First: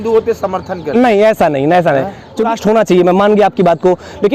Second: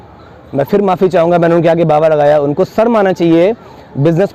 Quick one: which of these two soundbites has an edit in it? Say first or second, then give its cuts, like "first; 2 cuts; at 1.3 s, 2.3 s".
first; 1 cut; at 2.5 s